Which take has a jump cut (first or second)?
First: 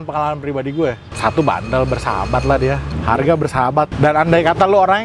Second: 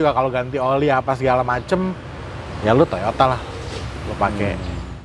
first